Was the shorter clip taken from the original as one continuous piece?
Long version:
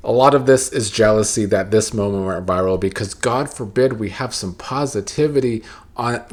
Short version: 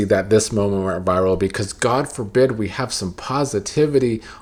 yes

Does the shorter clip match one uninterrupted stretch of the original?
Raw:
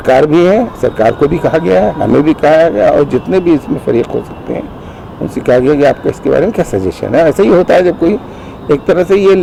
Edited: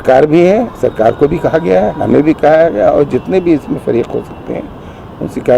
yes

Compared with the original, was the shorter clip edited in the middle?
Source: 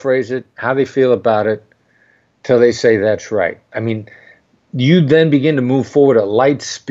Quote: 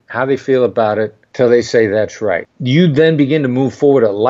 yes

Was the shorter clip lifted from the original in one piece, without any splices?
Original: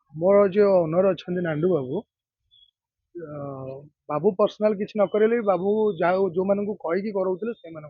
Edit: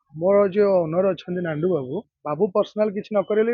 no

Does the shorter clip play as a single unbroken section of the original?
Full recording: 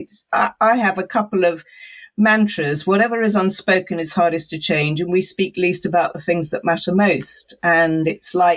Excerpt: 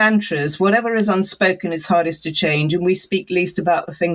yes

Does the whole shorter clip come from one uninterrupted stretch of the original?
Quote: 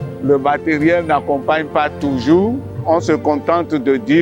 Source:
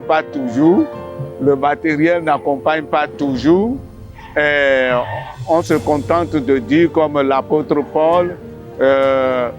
no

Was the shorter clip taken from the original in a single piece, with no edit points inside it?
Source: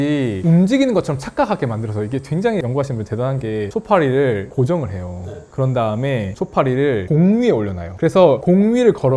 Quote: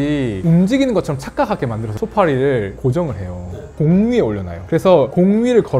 no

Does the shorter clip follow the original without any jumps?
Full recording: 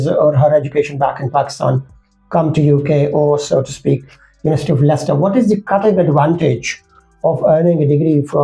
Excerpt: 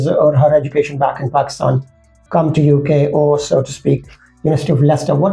yes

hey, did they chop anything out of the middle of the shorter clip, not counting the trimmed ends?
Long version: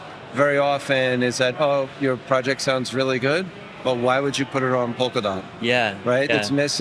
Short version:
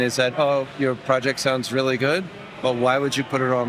no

